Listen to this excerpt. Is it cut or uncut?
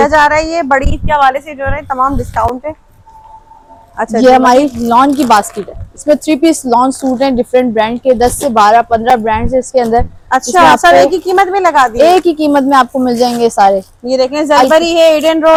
uncut